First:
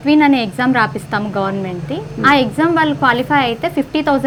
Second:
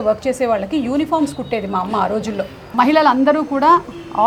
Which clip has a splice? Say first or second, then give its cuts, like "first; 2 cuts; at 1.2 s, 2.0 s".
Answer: second; 1 cut; at 2.7 s